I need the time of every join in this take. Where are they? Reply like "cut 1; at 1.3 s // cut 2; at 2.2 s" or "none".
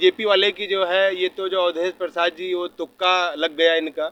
none